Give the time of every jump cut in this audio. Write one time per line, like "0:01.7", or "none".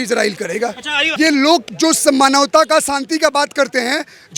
0:01.0

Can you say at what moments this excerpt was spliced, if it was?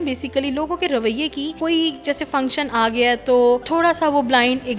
0:01.5
0:03.7

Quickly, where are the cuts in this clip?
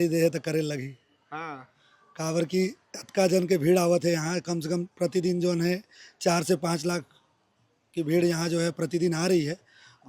none

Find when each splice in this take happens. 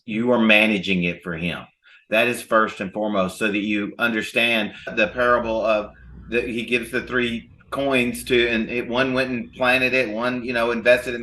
0:04.9

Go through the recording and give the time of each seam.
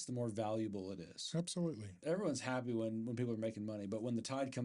0:02.0

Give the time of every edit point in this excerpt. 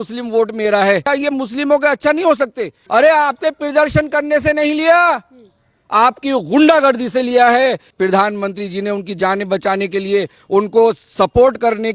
0:01.1
0:02.8
0:07.9

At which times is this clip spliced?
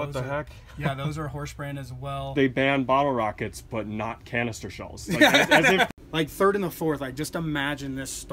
0:02.3
0:05.9

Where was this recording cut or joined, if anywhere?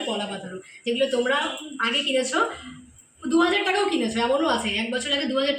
none

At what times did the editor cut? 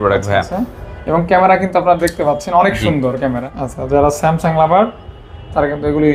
0:03.4

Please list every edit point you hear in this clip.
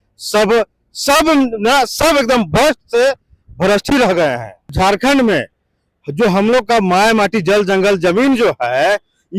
0:04.7

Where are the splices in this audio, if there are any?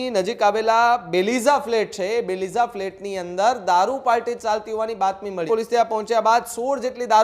0:05.5

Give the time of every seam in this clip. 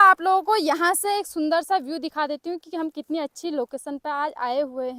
none

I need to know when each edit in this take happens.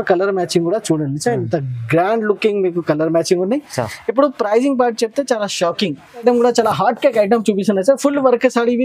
0:06.2

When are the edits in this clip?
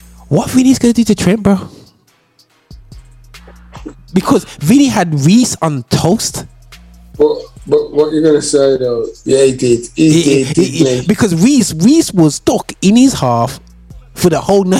none

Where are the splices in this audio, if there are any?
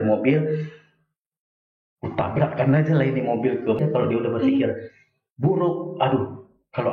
0:03.8

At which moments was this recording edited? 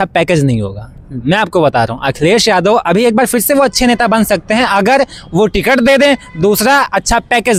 none

